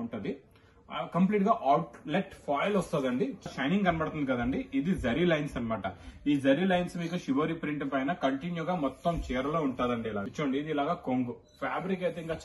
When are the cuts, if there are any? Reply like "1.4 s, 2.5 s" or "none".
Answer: 3.5 s, 10.2 s